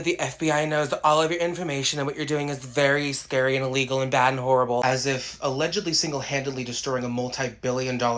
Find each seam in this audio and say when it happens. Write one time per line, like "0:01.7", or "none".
none